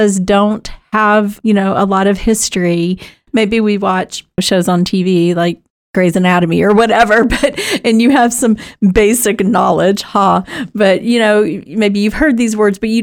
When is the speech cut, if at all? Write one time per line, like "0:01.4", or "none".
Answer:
none